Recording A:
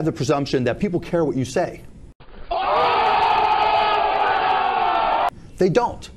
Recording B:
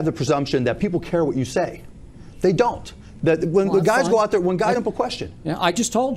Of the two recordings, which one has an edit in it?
B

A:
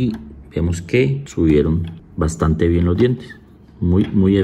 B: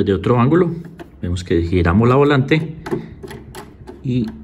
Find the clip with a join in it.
A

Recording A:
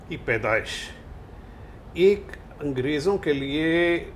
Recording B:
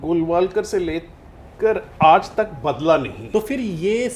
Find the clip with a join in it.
B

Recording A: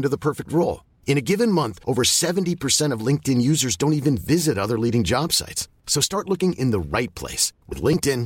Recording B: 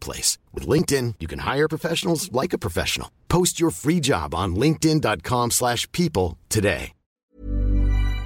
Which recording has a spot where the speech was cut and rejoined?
B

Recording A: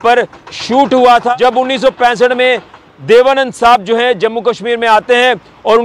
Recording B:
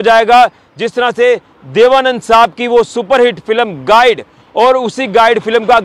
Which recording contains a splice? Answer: A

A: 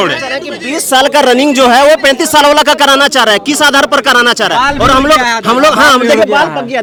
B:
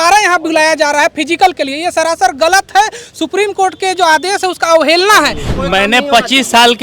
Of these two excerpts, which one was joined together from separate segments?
B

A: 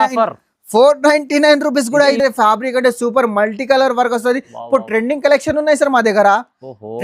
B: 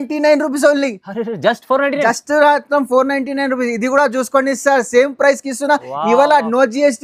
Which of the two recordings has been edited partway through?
A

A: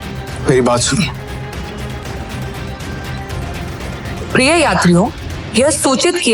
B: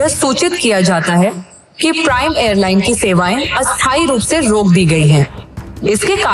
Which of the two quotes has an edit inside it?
A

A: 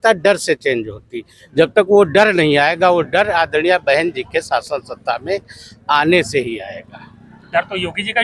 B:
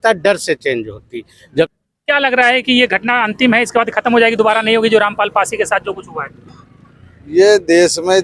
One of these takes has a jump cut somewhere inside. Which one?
B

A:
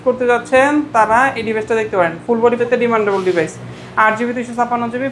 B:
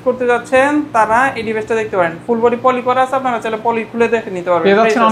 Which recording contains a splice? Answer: A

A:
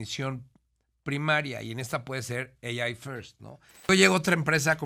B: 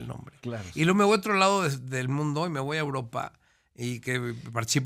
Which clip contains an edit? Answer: A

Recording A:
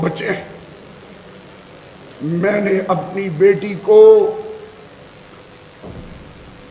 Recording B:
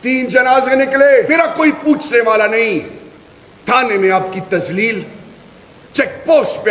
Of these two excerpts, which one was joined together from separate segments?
B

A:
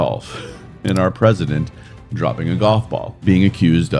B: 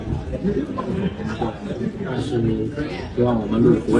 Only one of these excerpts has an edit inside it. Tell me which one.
A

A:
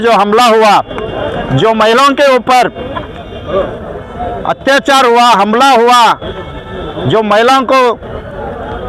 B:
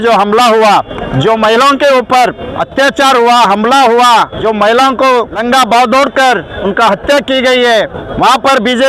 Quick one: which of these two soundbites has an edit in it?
B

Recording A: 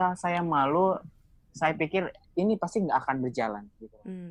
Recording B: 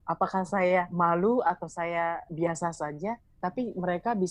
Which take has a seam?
B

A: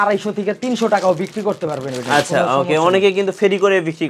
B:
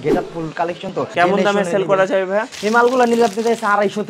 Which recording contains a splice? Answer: B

